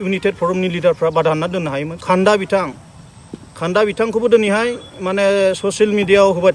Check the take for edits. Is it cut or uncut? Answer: cut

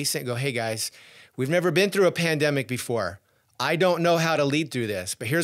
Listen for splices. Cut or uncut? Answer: uncut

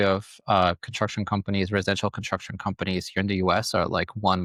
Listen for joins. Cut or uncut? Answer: uncut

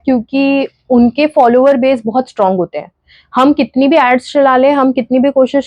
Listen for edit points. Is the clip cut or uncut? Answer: uncut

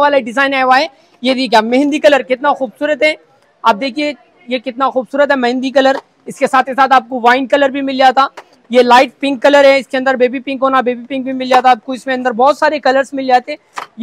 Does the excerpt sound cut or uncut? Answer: uncut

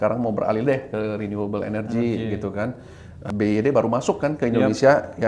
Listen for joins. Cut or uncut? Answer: cut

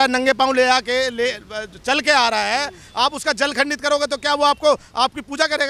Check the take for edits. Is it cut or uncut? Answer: uncut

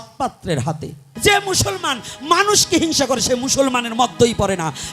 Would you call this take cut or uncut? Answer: cut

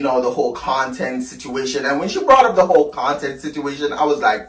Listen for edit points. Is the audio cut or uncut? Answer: uncut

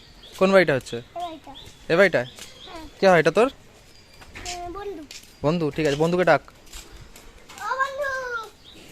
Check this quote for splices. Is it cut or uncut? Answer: uncut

